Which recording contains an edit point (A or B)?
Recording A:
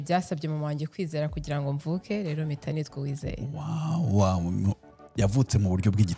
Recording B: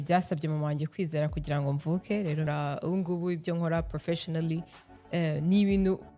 B